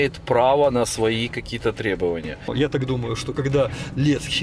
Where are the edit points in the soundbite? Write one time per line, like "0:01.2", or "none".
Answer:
0:02.5